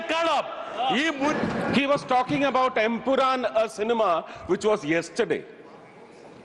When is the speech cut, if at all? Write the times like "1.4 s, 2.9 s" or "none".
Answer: 1.3 s